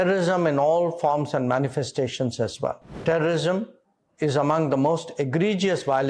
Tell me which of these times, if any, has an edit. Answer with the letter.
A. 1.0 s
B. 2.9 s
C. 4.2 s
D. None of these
B